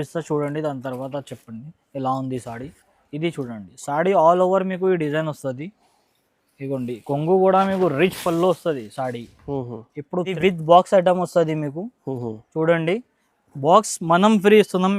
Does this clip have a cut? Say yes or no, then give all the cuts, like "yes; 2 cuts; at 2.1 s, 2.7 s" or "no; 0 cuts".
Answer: yes; 1 cut; at 10.4 s